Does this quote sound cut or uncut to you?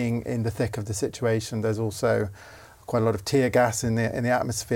uncut